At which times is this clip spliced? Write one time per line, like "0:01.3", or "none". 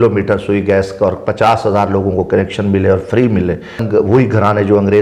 0:03.8